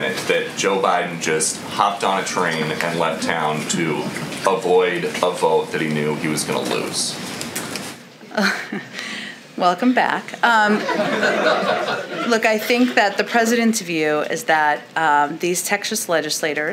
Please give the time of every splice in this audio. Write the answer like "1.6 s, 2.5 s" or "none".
none